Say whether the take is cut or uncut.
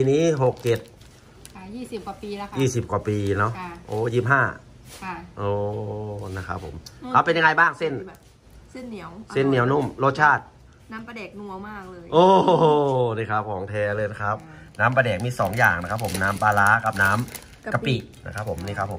uncut